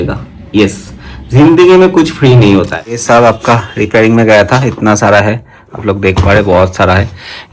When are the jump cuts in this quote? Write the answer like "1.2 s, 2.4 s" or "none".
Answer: 3.0 s

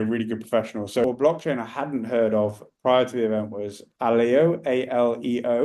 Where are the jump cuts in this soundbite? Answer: 1.0 s

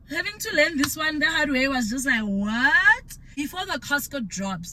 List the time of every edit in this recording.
3.0 s

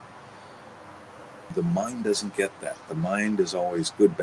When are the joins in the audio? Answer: 1.5 s

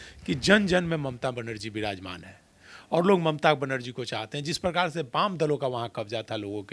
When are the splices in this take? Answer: none

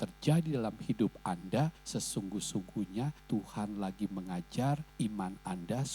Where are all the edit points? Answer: 1.8 s, 3.2 s, 4.9 s

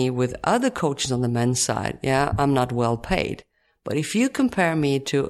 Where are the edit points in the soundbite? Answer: none

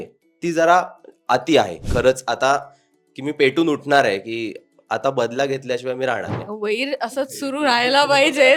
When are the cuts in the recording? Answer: 1.9 s, 6.3 s

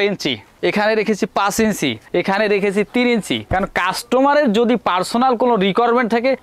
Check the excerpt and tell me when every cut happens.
none

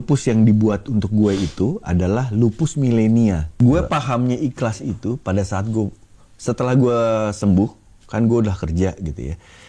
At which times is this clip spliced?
3.5 s

